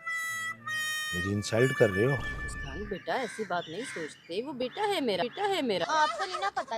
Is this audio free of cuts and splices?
no; 1 cut; at 5.8 s

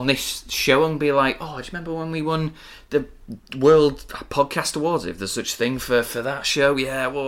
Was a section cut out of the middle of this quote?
no; 0 cuts

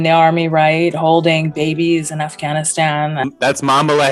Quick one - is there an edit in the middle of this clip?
no; 0 cuts

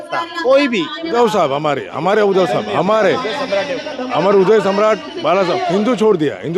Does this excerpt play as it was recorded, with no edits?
no; 1 cut; at 1.1 s

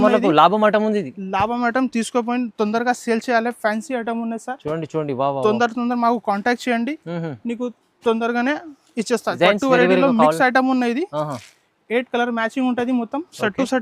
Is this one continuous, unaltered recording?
no; 1 cut; at 9.4 s

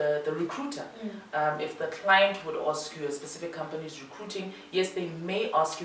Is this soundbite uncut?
yes; 0 cuts

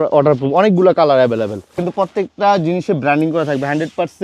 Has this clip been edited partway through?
yes; 1 cut; at 1.9 s

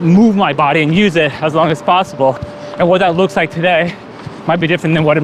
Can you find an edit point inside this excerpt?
no; 0 cuts

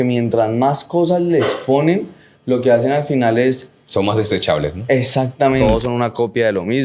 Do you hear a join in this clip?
yes; 1 cut; at 5.6 s

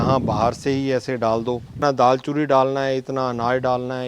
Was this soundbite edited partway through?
yes; 1 cut; at 1.8 s

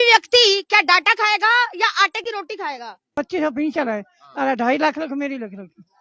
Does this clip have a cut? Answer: yes; 1 cut; at 3.1 s

